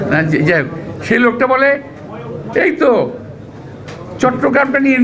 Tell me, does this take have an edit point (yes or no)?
no